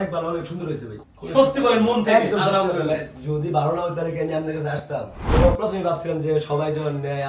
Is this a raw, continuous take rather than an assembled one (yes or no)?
no